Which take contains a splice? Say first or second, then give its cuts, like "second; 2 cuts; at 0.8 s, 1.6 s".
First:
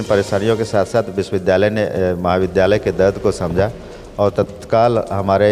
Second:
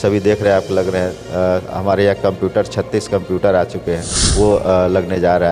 second; 1 cut; at 4.2 s